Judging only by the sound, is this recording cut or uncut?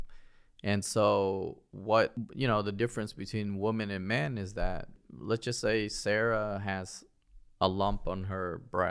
cut